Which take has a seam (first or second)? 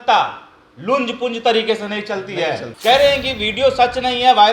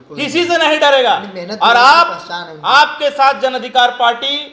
first